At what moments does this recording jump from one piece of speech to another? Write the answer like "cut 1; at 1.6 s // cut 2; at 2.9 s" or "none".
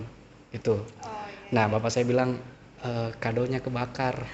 none